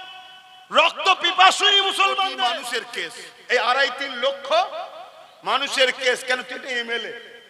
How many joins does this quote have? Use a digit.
1